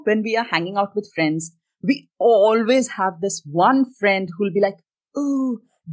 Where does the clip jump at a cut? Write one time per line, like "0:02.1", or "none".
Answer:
none

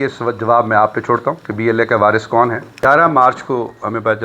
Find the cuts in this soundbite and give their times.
0:02.8

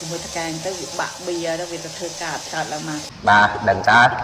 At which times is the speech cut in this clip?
0:03.1

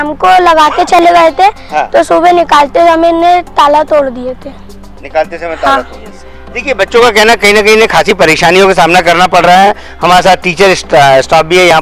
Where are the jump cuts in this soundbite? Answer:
none

